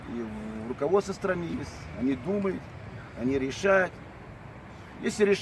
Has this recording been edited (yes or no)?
no